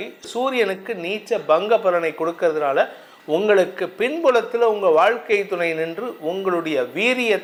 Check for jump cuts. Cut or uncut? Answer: uncut